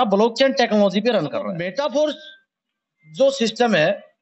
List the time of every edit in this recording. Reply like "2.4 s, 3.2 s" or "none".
1.5 s